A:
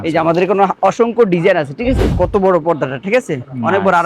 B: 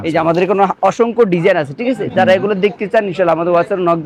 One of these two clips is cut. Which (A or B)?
A